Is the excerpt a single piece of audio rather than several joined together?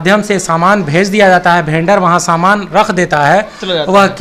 yes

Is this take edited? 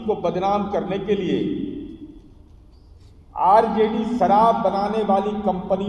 no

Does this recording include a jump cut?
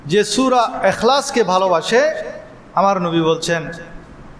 no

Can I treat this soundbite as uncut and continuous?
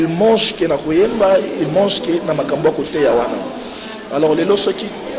yes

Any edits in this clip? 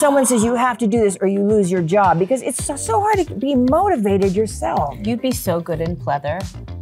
no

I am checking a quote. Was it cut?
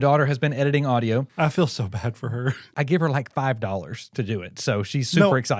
yes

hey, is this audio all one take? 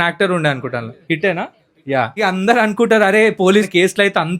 no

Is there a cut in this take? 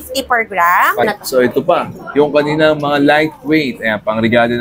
yes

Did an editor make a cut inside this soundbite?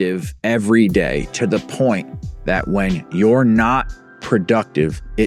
no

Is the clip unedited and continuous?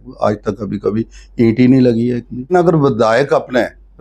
no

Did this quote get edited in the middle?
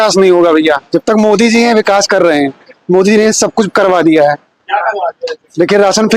no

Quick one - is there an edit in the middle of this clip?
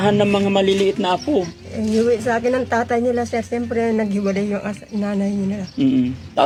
no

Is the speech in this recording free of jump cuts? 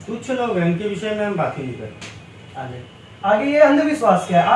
yes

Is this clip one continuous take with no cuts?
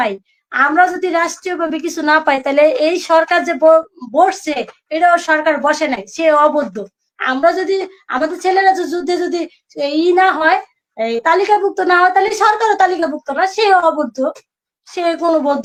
yes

